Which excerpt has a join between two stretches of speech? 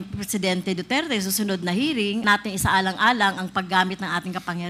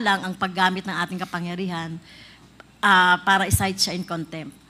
first; 1 cut; at 2.2 s

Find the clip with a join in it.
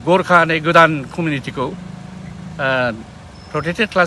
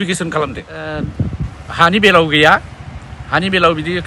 second; 1 cut; at 1.0 s

